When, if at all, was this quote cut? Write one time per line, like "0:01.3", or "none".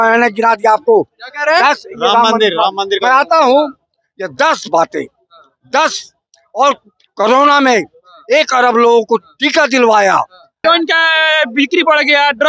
0:10.6